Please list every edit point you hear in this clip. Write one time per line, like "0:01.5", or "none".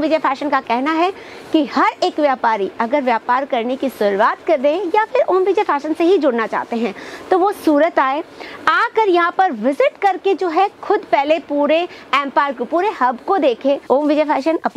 0:13.9

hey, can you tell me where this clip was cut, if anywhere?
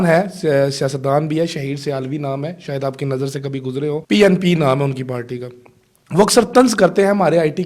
0:04.0

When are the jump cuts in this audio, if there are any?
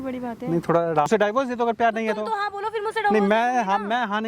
0:01.1

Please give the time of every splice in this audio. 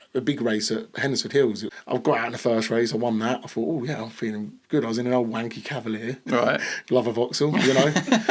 0:01.7

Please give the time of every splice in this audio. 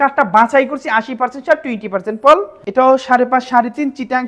0:02.6

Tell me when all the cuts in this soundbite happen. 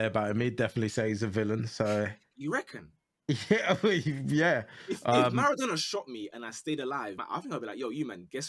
0:07.2

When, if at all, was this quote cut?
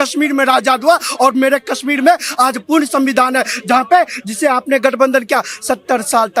none

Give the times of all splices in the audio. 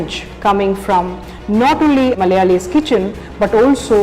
0:02.2

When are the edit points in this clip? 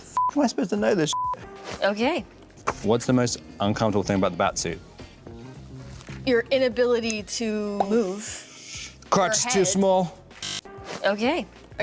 0:02.4
0:07.7

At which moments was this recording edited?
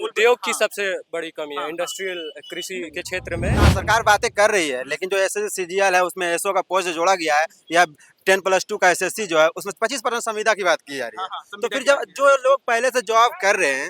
0:03.7

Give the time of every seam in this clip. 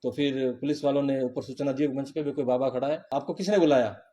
0:03.1

